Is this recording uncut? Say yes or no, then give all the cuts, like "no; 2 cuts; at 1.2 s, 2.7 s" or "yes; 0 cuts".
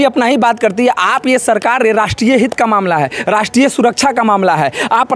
yes; 0 cuts